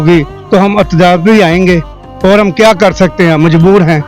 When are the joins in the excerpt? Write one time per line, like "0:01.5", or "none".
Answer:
none